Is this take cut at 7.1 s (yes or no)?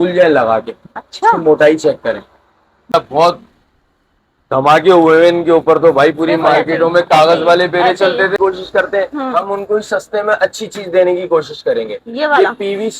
no